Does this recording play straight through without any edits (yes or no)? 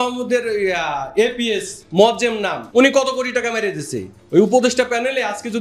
no